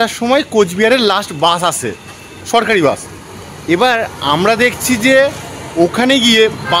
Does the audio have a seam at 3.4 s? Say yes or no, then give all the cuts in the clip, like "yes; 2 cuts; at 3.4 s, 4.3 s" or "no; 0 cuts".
no; 0 cuts